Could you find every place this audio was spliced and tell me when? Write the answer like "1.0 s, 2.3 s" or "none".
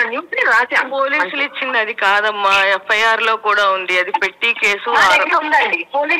none

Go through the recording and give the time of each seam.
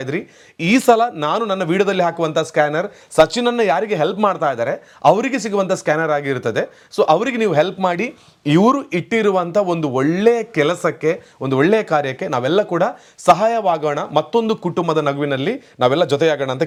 none

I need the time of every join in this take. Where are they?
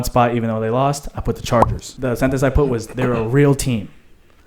1.8 s

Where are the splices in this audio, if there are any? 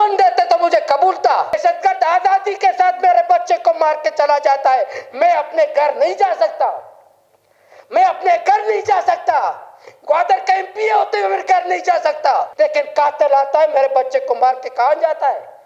1.6 s, 12.5 s

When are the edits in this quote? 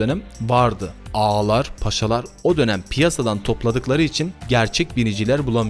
none

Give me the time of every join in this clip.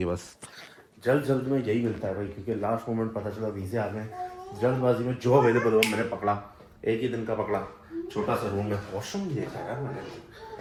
none

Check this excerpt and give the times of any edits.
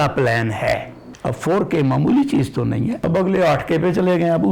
1.1 s, 3.0 s

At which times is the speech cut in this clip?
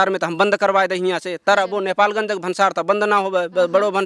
none

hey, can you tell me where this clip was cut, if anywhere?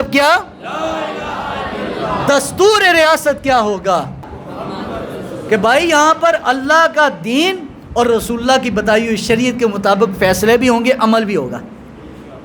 4.3 s

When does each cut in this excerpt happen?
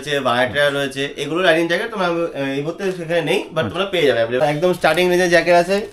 4.4 s

